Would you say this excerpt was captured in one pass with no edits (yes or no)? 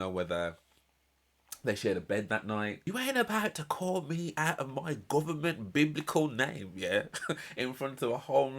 no